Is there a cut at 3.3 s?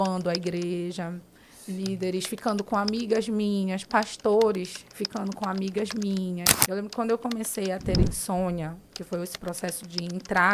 no; 1 cut; at 6.5 s

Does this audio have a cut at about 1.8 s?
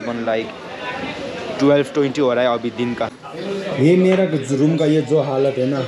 no; 1 cut; at 3.1 s

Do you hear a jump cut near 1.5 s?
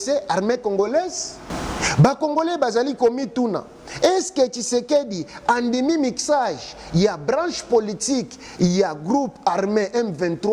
yes; 1 cut; at 1.5 s

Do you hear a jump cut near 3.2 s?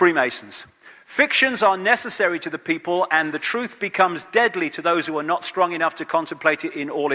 no; 0 cuts

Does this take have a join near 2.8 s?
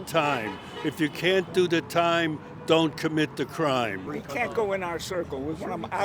no; 1 cut; at 4.1 s

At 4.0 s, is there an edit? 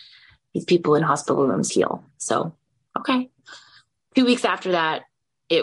yes; 1 cut; at 4.0 s

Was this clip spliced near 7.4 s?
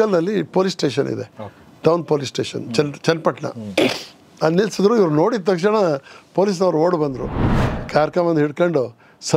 yes; 1 cut; at 7.4 s

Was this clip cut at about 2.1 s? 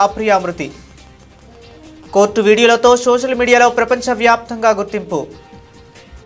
no; 1 cut; at 5.4 s

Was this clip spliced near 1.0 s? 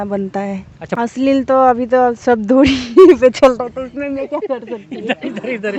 yes; 1 cut; at 1.0 s

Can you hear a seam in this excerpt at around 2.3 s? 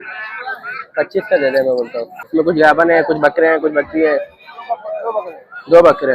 yes; 1 cut; at 2.3 s

